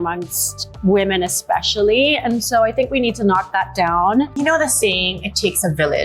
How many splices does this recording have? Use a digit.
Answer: 1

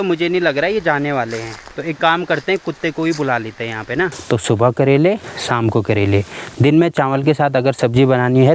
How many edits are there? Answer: 1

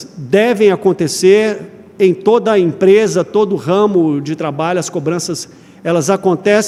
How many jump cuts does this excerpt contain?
0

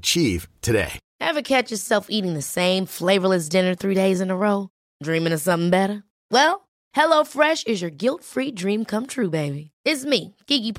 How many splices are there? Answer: 1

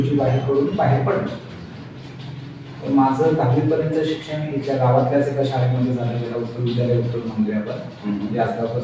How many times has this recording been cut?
1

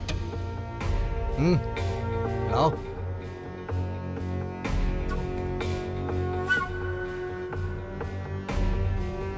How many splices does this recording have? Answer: 0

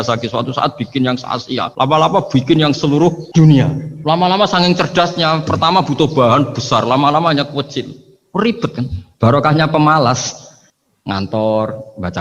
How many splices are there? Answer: 3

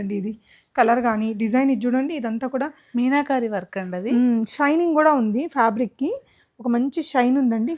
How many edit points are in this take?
0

